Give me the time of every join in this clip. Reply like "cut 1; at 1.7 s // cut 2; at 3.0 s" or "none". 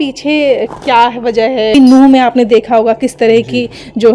cut 1; at 1.7 s